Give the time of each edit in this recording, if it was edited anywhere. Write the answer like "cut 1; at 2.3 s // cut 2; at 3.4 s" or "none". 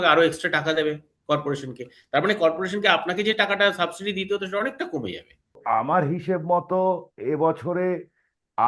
cut 1; at 5.6 s